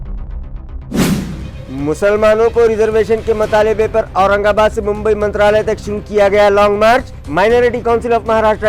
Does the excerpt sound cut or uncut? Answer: cut